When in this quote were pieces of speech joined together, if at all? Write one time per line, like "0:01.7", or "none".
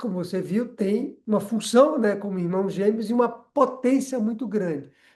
0:01.2